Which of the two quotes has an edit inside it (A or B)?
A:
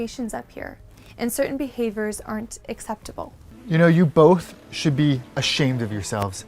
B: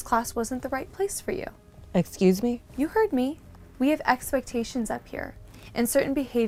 A